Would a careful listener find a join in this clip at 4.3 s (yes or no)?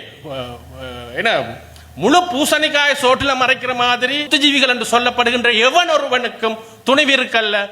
yes